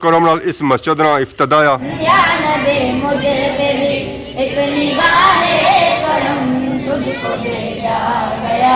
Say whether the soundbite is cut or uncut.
cut